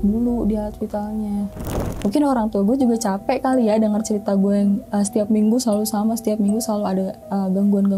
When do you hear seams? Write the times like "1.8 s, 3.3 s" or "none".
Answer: 1.9 s